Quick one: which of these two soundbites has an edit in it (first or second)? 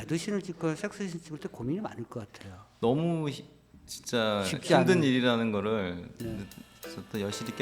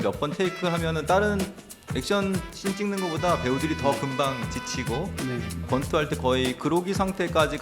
second